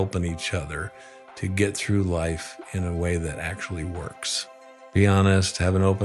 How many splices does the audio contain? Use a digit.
1